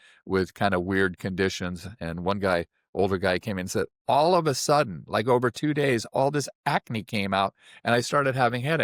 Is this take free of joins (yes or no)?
yes